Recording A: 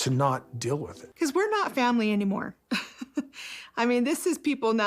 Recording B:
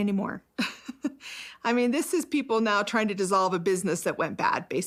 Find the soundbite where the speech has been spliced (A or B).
A